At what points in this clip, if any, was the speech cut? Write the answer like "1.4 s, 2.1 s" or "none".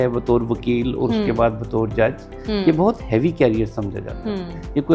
none